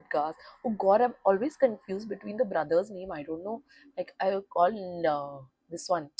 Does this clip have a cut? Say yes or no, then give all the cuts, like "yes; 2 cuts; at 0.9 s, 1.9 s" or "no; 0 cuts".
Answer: no; 0 cuts